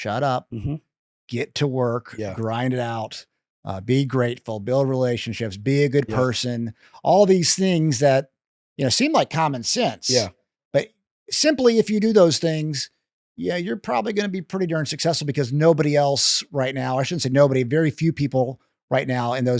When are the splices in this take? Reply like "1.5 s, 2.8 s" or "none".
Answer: none